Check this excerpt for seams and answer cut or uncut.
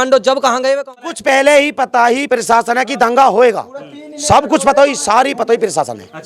cut